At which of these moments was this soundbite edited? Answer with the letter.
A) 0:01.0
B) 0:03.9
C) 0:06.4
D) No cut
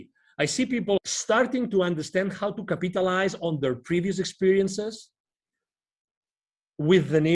A